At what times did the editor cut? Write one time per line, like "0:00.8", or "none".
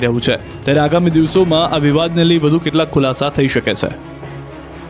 none

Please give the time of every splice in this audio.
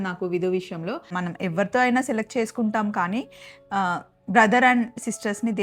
0:01.1

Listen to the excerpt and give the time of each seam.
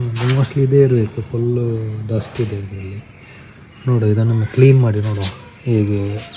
none

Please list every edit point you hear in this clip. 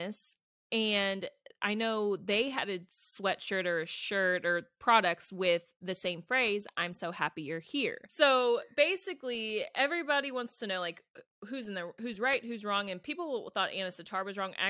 0:08.0

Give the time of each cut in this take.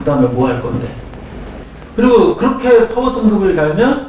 0:01.4

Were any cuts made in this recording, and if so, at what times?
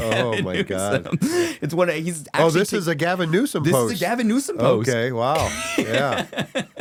none

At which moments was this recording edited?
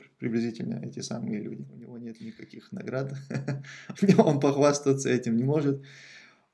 0:02.0

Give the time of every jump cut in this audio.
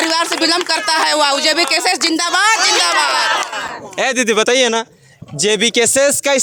none

